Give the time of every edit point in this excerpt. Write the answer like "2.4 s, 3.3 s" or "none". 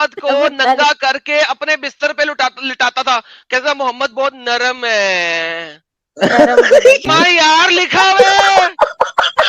7.1 s